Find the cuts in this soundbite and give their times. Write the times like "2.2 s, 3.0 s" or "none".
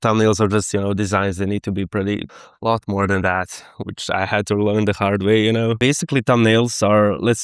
2.2 s, 5.8 s